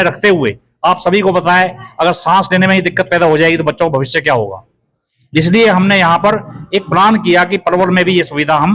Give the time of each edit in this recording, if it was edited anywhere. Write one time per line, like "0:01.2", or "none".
none